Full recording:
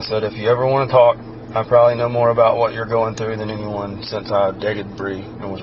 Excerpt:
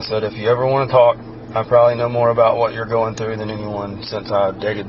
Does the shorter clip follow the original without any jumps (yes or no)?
yes